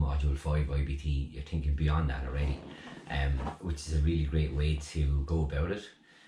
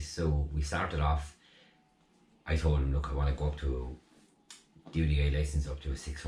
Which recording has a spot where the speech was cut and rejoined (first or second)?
first